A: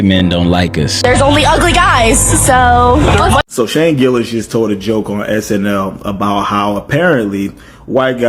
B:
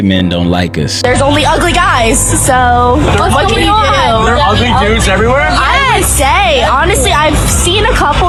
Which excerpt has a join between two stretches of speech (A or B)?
A